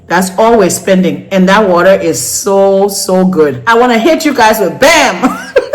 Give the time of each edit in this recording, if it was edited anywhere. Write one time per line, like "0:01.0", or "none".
0:03.6

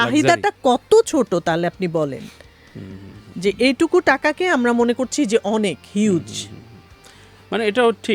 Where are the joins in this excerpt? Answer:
none

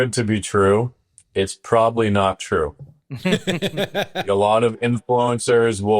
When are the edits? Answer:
0:04.3

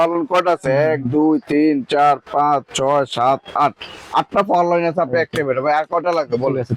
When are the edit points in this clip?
none

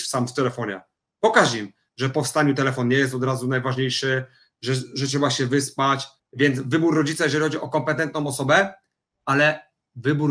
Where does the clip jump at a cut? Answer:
0:06.1

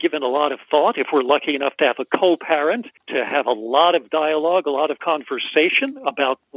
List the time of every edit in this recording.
0:02.9

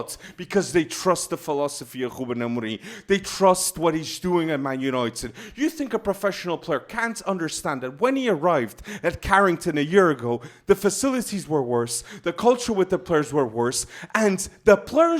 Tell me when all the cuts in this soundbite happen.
none

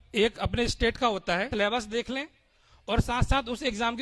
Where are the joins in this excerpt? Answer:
0:01.5

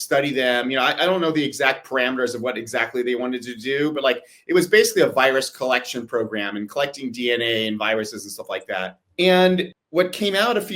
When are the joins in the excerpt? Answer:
0:09.0
0:09.8

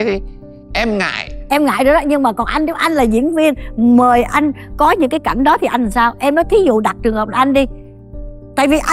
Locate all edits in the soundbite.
none

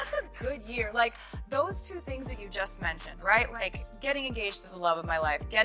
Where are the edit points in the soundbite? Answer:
none

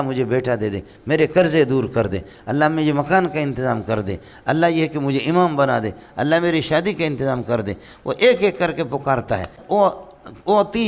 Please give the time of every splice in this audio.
0:09.6

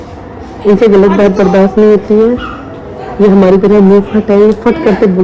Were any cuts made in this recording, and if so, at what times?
none

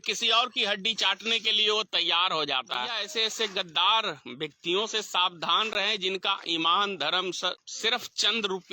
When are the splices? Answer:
0:03.0
0:07.7

